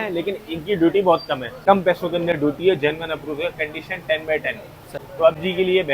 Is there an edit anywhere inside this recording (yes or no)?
yes